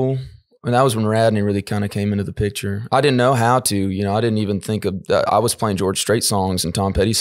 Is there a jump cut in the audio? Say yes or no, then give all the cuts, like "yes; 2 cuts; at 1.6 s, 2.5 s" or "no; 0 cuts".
no; 0 cuts